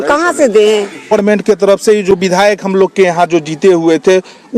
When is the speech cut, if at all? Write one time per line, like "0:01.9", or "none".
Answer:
0:01.1

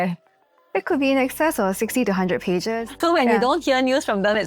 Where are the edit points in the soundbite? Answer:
0:03.0

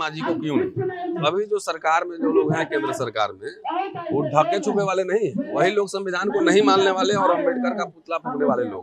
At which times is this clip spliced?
0:01.2

